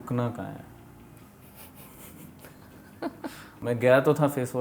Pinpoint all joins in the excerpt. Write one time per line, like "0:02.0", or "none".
0:03.6